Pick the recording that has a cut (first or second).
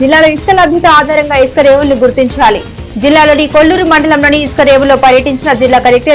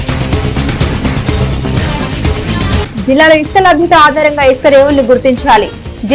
second